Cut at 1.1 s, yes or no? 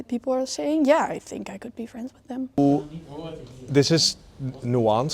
no